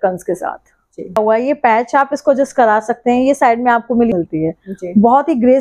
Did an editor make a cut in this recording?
yes; 2 cuts; at 1.2 s, 4.1 s

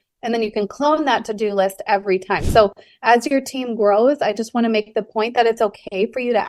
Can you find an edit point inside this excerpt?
yes; 1 cut; at 2.4 s

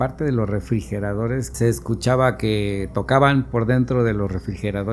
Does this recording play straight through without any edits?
no; 1 cut; at 1.5 s

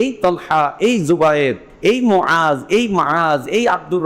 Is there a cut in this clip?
yes; 1 cut; at 1.7 s

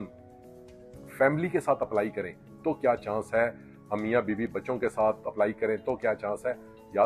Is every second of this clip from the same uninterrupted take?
yes; 0 cuts

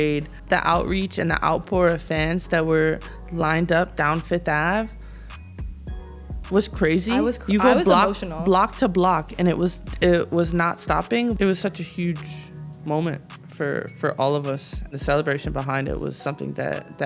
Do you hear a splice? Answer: no; 0 cuts

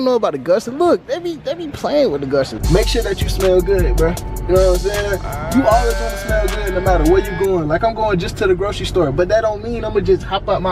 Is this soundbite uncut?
no; 1 cut; at 2.6 s

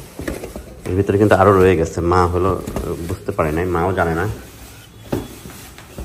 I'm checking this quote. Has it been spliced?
no; 0 cuts

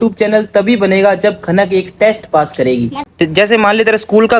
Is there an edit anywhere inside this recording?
yes; 1 cut; at 3.0 s

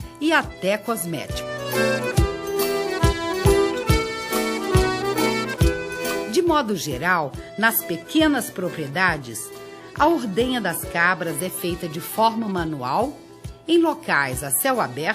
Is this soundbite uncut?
yes; 0 cuts

